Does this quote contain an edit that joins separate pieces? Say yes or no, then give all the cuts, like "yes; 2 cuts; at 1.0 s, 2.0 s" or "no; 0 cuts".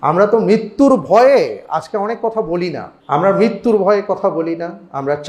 yes; 1 cut; at 2.9 s